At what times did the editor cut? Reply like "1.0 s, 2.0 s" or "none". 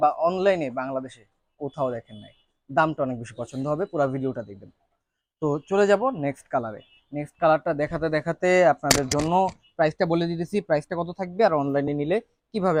none